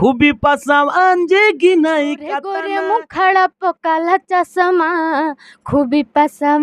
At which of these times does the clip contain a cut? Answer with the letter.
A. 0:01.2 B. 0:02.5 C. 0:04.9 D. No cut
B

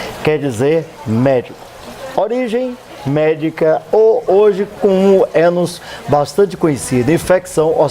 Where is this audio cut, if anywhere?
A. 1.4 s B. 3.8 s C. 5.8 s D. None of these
B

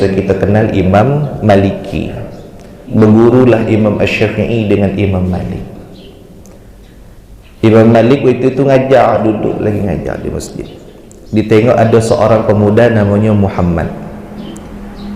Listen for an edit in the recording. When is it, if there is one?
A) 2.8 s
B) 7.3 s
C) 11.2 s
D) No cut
A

